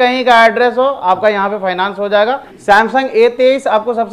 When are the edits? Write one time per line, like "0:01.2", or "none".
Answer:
0:02.5